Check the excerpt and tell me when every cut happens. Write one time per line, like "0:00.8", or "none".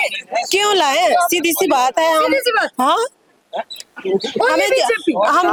none